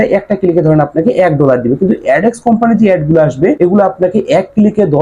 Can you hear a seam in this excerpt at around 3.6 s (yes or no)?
yes